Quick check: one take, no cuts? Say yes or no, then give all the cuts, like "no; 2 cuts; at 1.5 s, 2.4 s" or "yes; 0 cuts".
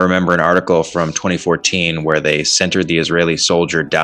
yes; 0 cuts